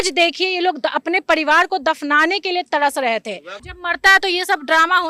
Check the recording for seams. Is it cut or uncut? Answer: cut